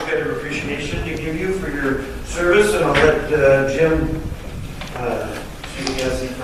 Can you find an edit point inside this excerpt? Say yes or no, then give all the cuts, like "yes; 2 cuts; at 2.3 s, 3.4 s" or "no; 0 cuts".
no; 0 cuts